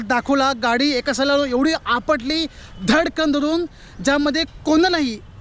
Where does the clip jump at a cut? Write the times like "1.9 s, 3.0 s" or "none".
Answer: none